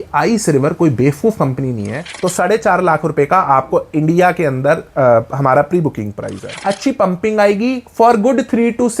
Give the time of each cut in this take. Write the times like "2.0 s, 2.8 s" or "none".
2.1 s, 6.6 s